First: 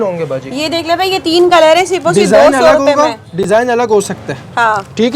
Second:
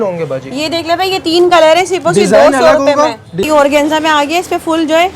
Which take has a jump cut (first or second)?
second